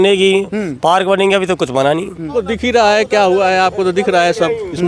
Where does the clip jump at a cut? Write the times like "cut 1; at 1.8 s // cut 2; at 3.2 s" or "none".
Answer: cut 1; at 2.4 s